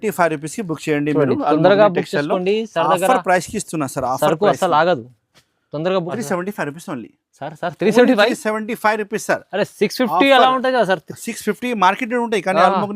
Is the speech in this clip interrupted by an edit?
yes; 1 cut; at 6.1 s

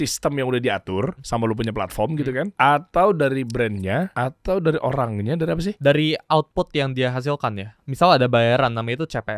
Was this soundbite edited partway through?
yes; 5 cuts; at 1.2 s, 2.5 s, 4.1 s, 5.7 s, 7.7 s

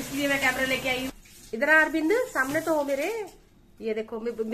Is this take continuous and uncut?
no; 1 cut; at 1.1 s

